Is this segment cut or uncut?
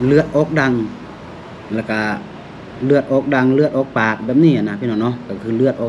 uncut